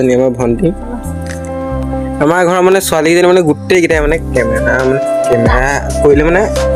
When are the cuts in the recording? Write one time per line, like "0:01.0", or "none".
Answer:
none